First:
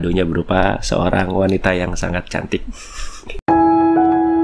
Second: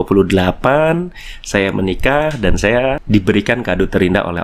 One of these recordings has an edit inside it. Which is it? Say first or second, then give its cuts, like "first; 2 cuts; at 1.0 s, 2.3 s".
second; 1 cut; at 3.0 s